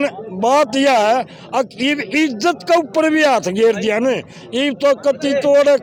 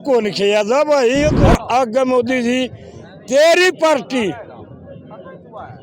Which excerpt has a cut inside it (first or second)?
second